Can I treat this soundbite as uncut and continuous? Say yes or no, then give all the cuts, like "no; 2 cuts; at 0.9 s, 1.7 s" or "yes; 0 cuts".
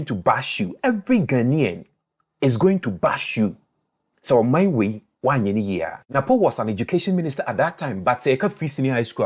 no; 1 cut; at 6.0 s